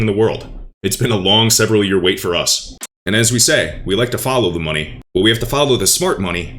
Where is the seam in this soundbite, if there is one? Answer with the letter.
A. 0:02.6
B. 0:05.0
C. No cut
A